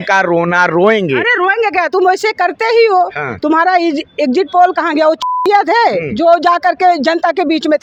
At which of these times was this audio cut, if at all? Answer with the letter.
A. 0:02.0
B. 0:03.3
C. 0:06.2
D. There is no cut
D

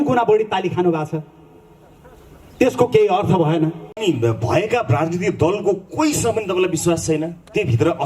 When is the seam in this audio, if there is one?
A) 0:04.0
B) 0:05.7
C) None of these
A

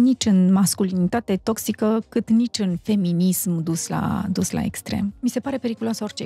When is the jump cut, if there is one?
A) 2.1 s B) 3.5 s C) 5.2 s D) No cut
C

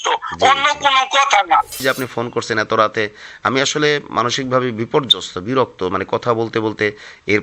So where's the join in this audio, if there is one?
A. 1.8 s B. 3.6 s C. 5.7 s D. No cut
A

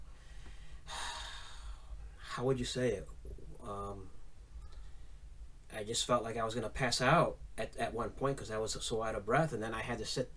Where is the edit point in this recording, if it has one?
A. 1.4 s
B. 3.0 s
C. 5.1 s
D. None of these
D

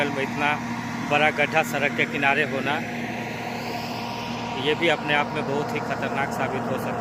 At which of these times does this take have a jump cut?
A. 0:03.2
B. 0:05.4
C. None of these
C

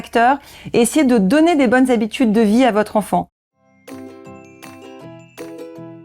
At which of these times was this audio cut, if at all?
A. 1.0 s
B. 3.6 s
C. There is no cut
B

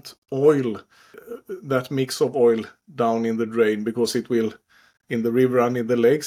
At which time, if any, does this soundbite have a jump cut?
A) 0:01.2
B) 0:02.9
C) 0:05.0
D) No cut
A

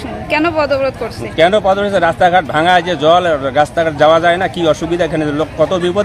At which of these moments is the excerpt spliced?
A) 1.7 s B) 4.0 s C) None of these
C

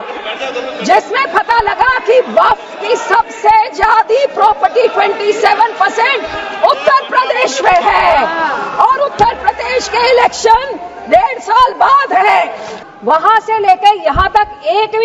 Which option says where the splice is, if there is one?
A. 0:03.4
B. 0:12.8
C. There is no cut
B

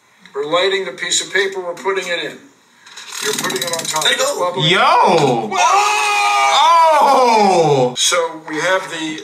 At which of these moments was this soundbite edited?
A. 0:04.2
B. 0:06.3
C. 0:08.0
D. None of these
C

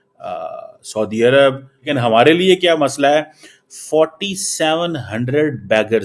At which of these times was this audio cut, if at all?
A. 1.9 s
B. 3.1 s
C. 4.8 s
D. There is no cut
A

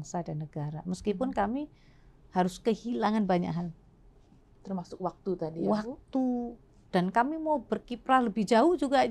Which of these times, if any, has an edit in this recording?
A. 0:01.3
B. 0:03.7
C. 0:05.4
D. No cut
D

